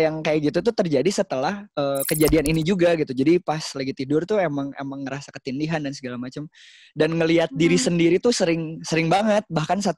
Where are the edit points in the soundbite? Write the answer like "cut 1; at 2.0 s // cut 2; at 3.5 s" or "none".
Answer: cut 1; at 1.6 s